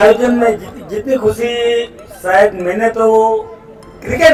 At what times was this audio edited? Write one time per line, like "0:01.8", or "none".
none